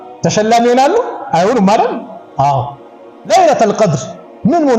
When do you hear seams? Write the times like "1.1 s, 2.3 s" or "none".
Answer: 3.3 s